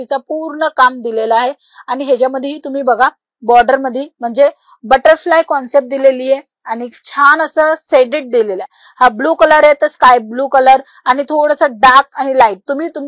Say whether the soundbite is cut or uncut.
uncut